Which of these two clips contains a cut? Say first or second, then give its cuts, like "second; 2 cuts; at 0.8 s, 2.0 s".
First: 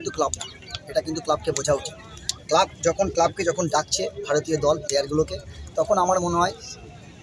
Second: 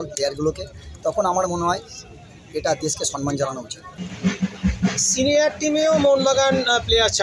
second; 1 cut; at 4.1 s